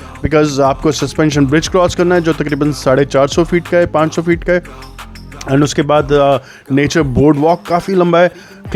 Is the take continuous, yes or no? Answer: yes